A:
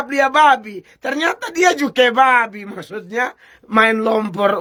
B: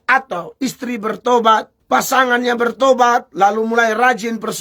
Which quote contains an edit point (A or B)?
B